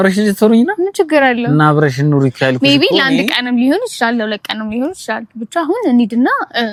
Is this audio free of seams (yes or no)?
yes